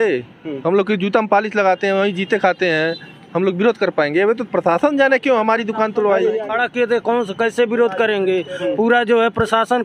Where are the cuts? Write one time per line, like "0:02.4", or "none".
0:06.5